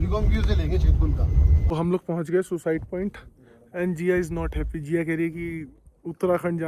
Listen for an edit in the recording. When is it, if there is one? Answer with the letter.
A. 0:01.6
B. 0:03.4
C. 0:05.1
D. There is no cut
A